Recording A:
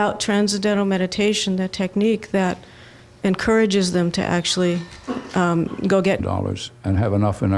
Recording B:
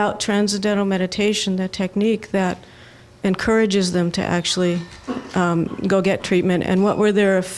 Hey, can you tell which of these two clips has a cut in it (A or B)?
B